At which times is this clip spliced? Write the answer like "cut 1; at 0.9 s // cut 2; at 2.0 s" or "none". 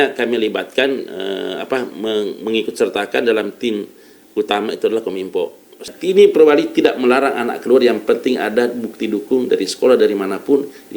cut 1; at 5.9 s